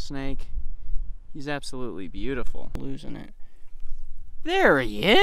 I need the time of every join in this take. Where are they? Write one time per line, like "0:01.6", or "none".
0:02.7